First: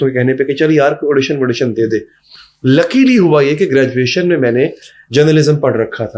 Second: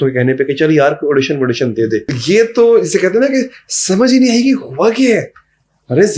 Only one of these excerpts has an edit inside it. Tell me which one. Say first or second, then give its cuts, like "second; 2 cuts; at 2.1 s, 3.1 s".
second; 1 cut; at 2.1 s